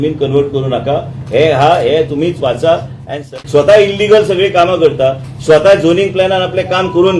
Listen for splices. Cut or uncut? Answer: cut